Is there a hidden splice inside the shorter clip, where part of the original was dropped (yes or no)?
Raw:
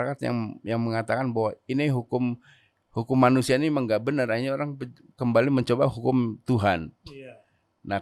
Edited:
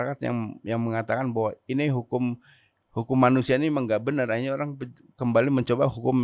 no